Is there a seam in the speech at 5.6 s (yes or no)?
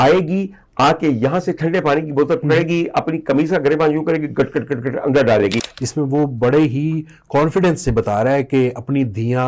yes